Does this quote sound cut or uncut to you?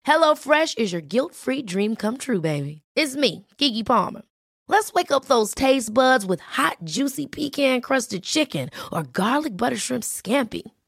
uncut